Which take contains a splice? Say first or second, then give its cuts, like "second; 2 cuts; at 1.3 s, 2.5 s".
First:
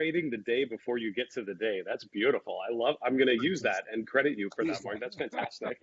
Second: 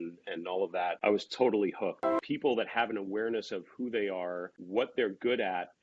second; 3 cuts; at 1.0 s, 2.2 s, 4.5 s